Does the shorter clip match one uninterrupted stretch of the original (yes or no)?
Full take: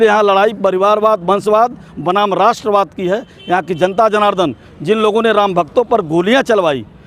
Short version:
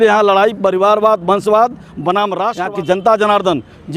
no